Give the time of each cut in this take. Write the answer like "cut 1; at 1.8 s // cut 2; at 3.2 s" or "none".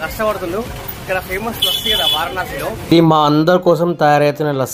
cut 1; at 2.9 s